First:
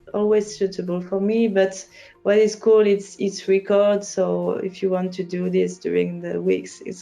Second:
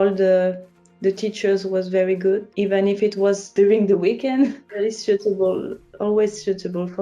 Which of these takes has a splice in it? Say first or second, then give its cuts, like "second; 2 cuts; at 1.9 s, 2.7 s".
second; 3 cuts; at 2.5 s, 3.5 s, 4.6 s